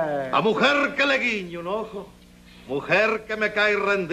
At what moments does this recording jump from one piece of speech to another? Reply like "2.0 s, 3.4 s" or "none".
0.9 s